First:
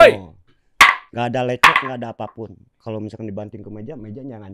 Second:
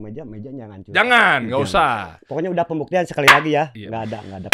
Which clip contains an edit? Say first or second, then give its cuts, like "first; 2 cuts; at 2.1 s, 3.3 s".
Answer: first; 2 cuts; at 1.1 s, 2.7 s